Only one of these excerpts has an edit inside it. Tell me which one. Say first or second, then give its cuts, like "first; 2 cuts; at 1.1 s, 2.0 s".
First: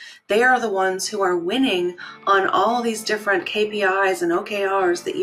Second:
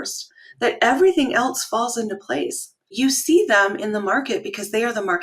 second; 1 cut; at 2.9 s